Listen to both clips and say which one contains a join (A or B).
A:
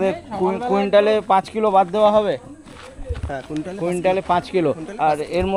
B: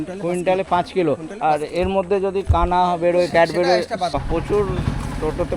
B